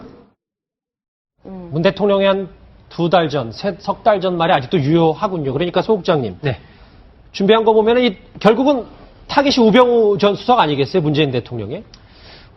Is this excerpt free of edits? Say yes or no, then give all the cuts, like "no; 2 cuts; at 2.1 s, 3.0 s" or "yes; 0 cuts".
no; 1 cut; at 8.0 s